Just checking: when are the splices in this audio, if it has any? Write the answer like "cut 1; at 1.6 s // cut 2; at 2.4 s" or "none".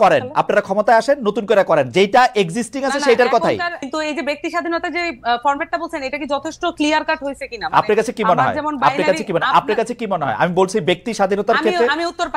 cut 1; at 3.9 s